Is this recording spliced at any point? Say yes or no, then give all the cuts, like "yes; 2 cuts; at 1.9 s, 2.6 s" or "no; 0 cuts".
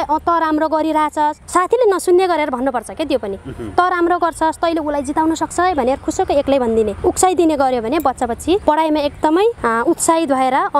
no; 0 cuts